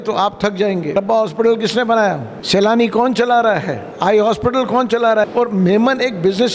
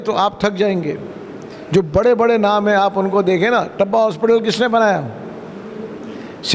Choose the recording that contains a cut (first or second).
first